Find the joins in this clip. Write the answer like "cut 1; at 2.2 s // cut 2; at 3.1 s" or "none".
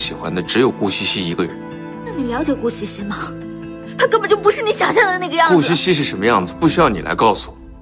cut 1; at 2.1 s